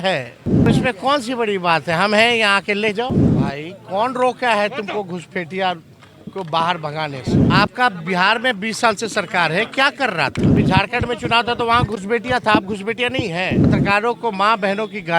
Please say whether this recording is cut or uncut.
cut